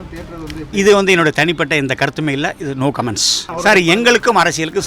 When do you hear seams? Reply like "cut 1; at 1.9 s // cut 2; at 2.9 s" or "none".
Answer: cut 1; at 3.4 s